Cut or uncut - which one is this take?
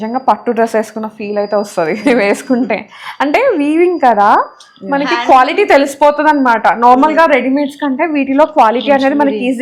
uncut